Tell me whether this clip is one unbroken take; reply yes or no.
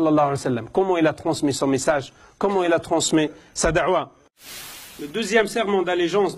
yes